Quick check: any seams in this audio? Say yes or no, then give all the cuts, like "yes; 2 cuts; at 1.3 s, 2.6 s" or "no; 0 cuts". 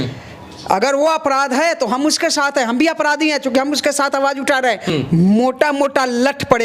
yes; 1 cut; at 4.9 s